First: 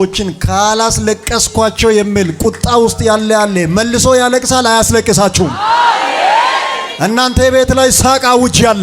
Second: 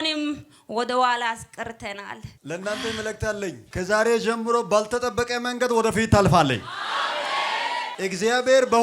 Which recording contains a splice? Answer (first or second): second